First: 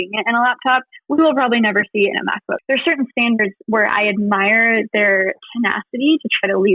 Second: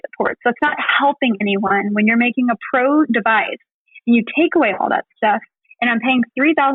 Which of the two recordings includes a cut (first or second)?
first